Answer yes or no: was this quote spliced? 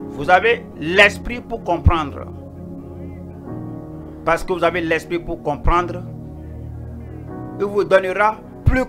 no